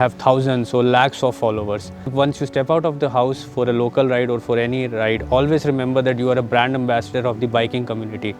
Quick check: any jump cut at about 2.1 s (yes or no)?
yes